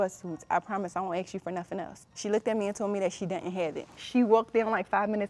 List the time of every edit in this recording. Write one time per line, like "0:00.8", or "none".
0:02.0
0:03.9